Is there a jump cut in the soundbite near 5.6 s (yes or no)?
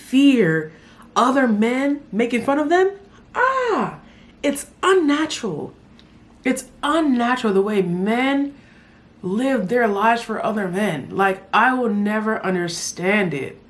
no